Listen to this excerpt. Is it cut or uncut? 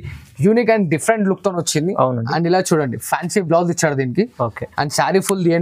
uncut